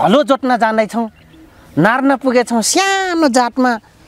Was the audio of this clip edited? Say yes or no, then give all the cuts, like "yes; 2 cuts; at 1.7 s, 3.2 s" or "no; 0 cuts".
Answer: no; 0 cuts